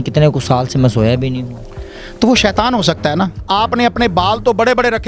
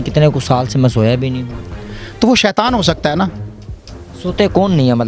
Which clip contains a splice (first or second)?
first